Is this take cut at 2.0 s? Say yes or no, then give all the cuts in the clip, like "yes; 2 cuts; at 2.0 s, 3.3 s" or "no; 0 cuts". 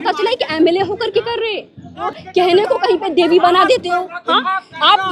yes; 1 cut; at 2.0 s